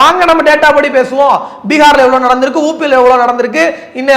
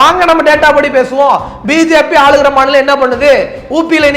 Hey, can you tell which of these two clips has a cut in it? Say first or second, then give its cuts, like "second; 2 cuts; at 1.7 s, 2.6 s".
second; 1 cut; at 1.6 s